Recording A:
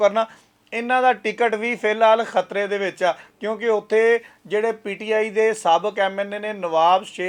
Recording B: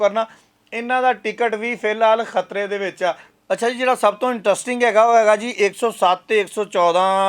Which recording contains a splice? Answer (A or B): B